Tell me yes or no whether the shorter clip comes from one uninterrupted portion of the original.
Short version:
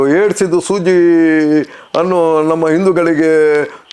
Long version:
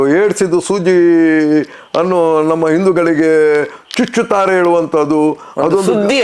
yes